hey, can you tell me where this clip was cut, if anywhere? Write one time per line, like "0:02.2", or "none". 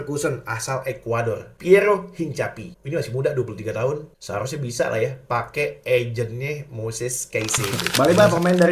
0:07.7